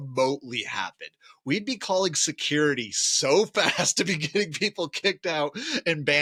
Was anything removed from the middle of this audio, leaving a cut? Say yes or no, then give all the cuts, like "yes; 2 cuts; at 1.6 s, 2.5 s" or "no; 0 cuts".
no; 0 cuts